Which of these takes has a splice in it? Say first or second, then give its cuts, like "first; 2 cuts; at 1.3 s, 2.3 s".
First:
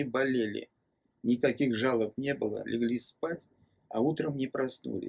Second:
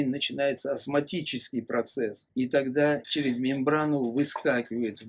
second; 2 cuts; at 2.2 s, 3.0 s